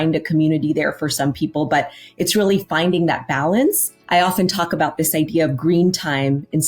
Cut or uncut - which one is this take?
cut